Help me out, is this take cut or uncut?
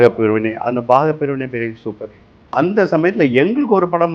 cut